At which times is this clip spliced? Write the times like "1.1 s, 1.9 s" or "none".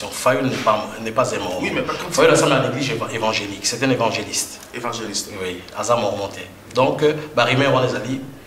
none